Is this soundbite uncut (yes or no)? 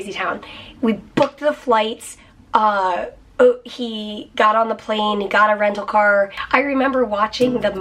no